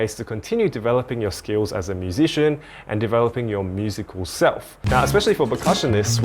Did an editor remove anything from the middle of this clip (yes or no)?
yes